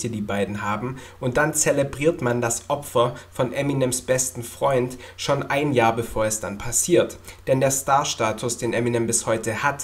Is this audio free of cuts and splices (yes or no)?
yes